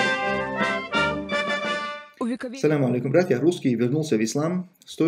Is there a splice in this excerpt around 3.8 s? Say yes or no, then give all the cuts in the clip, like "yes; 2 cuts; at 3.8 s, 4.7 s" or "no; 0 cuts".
no; 1 cut; at 2.0 s